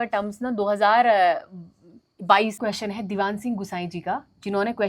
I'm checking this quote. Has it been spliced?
yes; 1 cut; at 2.6 s

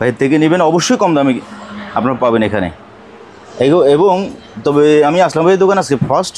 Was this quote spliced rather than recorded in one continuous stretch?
no; 0 cuts

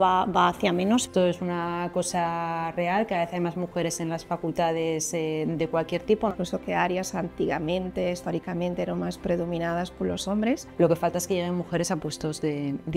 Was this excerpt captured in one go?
no; 3 cuts; at 1.1 s, 6.3 s, 10.7 s

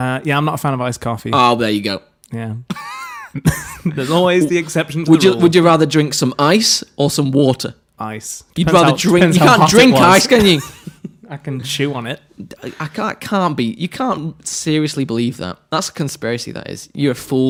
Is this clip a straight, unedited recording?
yes; 0 cuts

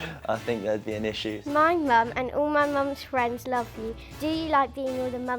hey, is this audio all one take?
no; 2 cuts; at 1.4 s, 4.0 s

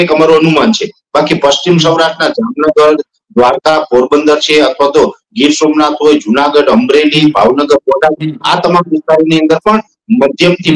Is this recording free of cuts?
yes; 0 cuts

